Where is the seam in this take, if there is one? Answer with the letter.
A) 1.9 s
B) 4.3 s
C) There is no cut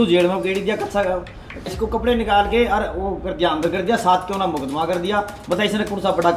A